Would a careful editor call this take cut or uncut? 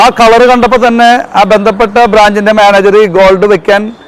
uncut